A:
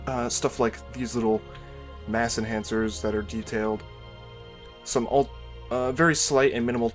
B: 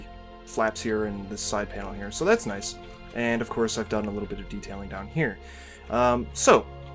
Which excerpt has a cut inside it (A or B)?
A